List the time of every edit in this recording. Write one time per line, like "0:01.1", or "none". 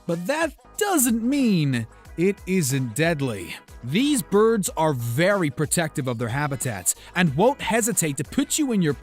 0:02.7